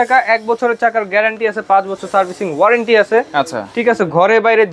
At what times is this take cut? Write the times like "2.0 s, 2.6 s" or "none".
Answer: none